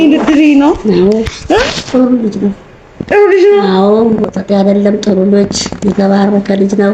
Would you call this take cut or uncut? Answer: uncut